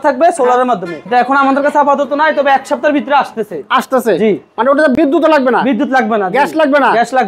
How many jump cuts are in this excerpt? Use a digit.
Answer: 0